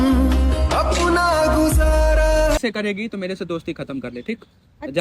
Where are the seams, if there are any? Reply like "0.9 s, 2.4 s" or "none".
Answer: 2.6 s